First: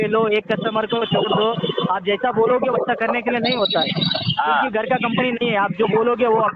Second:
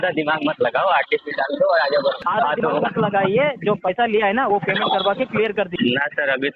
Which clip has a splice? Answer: second; 2 cuts; at 2.2 s, 5.7 s

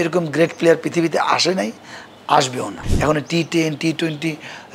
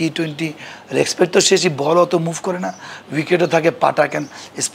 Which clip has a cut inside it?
first; 1 cut; at 2.8 s

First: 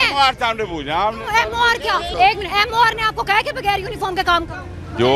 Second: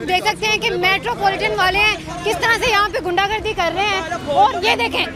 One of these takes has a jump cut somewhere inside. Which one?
first; 1 cut; at 2.1 s

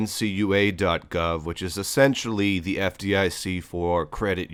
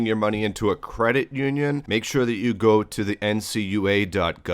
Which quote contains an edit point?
second; 1 cut; at 1.8 s

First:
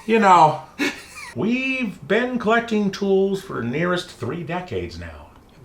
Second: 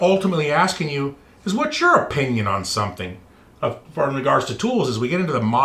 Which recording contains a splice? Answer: first; 1 cut; at 1.3 s

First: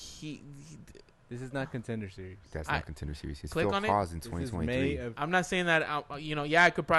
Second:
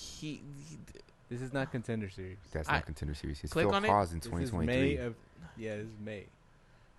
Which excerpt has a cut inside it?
first; 1 cut; at 5.1 s

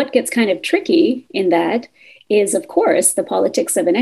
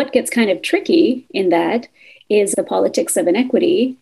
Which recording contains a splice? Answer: second; 1 cut; at 2.5 s

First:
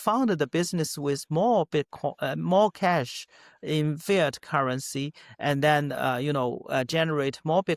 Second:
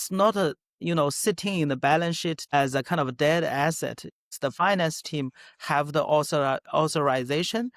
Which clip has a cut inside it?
second; 2 cuts; at 2.4 s, 4.3 s

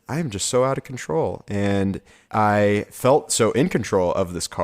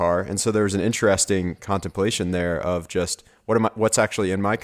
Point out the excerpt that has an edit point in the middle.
first; 2 cuts; at 2.1 s, 2.9 s

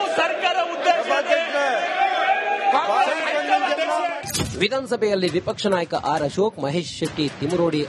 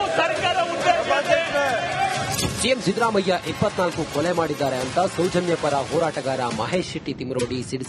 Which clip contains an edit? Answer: second; 1 cut; at 2.1 s

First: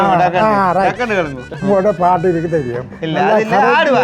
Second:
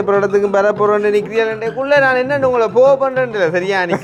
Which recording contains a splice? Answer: first; 1 cut; at 1.5 s

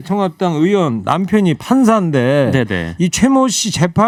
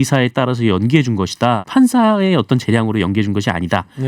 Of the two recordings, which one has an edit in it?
second; 1 cut; at 1.6 s

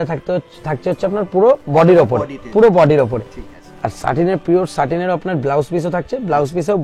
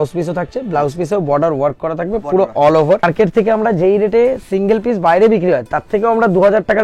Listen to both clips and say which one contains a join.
second; 1 cut; at 3.0 s

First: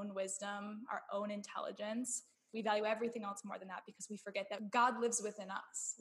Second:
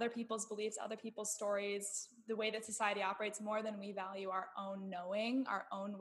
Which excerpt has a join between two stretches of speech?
first; 1 cut; at 4.6 s

